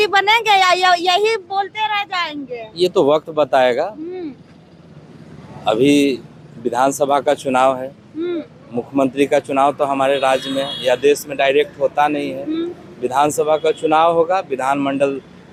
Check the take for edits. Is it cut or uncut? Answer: uncut